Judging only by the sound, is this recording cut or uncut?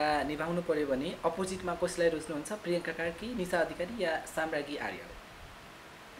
uncut